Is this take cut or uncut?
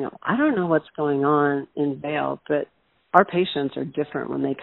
uncut